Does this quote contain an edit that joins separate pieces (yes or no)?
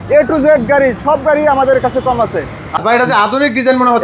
yes